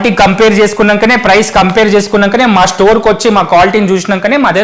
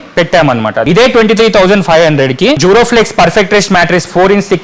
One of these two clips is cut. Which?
second; 2 cuts; at 0.8 s, 2.6 s

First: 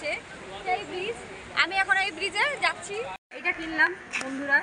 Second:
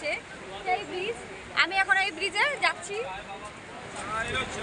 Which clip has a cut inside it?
first; 1 cut; at 3.2 s

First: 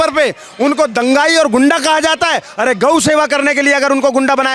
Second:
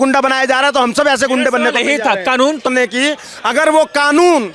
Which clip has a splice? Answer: second; 1 cut; at 2.7 s

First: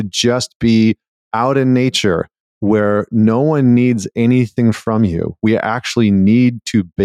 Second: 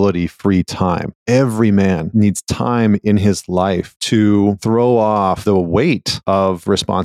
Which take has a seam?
second; 6 cuts; at 1.1 s, 2.0 s, 3.9 s, 4.6 s, 5.4 s, 6.1 s

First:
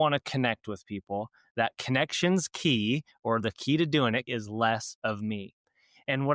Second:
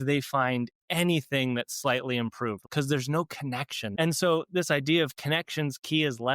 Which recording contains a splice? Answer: second; 2 cuts; at 2.6 s, 3.9 s

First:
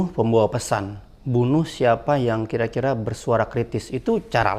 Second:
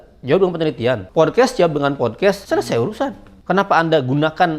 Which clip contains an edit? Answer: second; 3 cuts; at 1.0 s, 2.4 s, 3.3 s

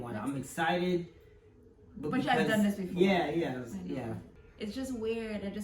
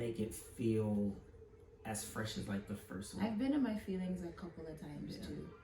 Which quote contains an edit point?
first; 1 cut; at 4.3 s

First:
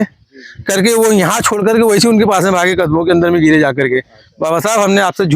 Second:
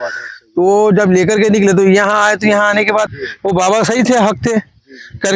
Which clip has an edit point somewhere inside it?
second; 1 cut; at 3.1 s

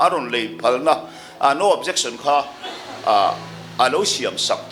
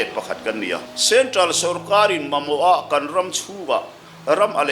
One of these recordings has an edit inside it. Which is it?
second; 1 cut; at 0.9 s

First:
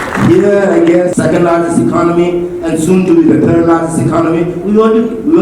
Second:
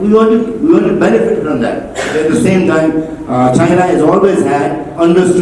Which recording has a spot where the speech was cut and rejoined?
first; 1 cut; at 1.1 s

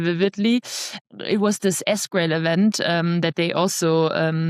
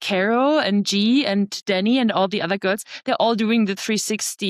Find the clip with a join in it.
first; 1 cut; at 1.0 s

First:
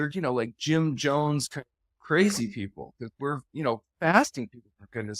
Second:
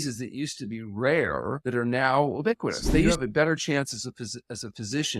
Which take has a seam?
second; 2 cuts; at 1.6 s, 3.1 s

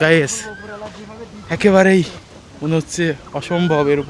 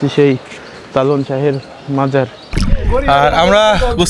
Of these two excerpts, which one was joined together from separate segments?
second; 1 cut; at 2.5 s

